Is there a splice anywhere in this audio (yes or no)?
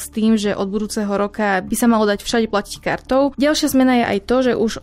yes